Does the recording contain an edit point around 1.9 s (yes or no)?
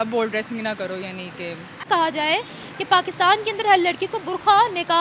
yes